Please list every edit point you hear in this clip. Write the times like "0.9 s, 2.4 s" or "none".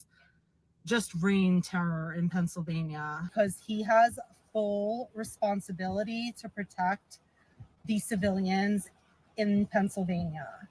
3.3 s